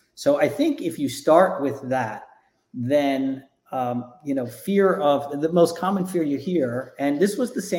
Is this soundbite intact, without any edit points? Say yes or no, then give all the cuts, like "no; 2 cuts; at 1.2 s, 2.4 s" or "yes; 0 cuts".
yes; 0 cuts